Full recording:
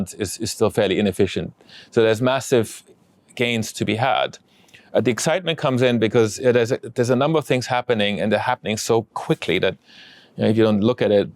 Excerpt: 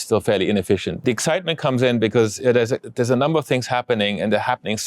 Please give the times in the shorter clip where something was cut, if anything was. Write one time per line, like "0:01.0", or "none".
0:01.0